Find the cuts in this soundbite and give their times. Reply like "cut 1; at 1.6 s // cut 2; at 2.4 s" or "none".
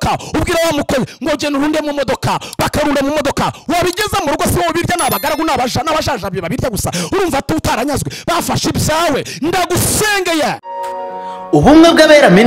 cut 1; at 10.7 s

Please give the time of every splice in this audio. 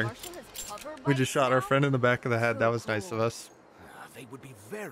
none

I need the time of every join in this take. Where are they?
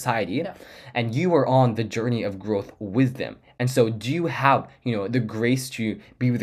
none

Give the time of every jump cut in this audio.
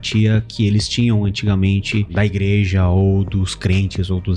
cut 1; at 2.1 s

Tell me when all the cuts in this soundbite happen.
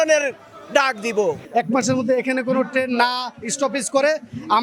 cut 1; at 1.4 s

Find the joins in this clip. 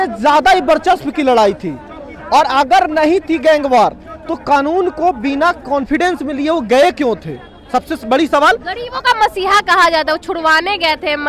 none

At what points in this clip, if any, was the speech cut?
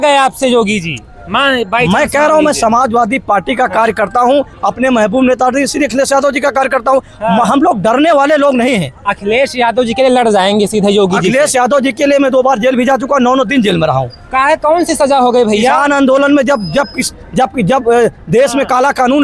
none

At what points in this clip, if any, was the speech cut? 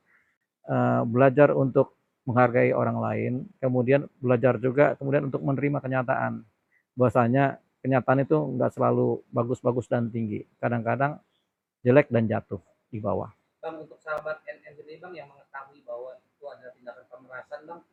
none

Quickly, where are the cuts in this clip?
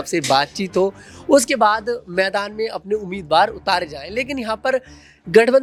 none

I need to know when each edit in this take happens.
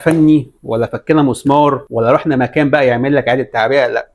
cut 1; at 1.9 s

